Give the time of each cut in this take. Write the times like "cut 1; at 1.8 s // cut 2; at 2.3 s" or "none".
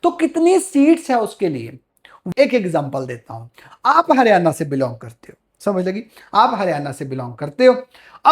cut 1; at 2.2 s